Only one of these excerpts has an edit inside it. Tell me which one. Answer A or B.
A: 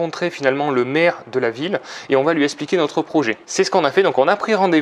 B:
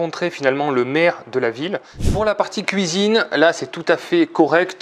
B